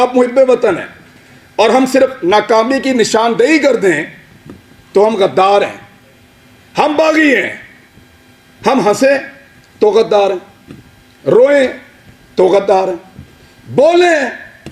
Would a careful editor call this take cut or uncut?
uncut